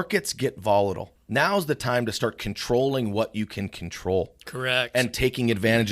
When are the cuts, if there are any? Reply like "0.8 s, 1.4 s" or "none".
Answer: 1.1 s

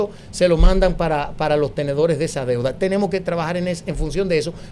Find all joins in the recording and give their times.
none

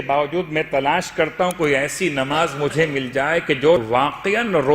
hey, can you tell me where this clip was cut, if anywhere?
3.8 s

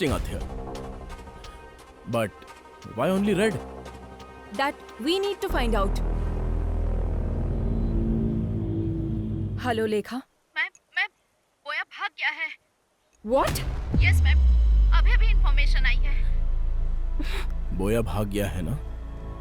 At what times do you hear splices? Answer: 9.5 s

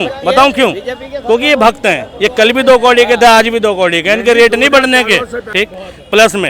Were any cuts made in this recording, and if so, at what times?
5.4 s

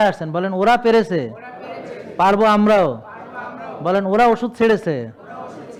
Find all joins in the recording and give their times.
none

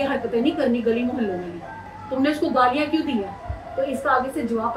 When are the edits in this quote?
none

